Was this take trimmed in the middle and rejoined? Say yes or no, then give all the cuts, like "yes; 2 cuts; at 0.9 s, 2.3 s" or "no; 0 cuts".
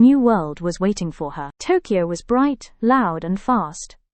no; 0 cuts